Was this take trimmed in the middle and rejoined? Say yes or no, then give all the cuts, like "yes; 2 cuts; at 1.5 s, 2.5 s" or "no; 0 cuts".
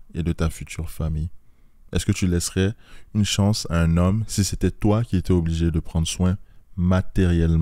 no; 0 cuts